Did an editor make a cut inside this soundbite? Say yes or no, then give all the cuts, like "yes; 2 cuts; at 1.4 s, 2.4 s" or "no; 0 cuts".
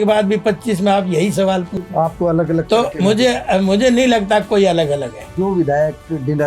yes; 1 cut; at 5.3 s